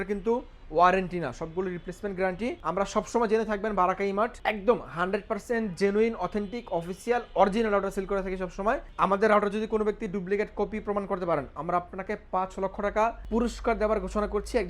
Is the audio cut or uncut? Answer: cut